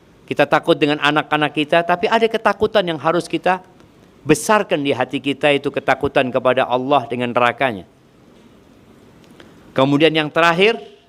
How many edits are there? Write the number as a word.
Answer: zero